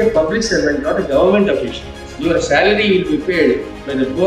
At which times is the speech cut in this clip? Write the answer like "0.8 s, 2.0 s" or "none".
2.0 s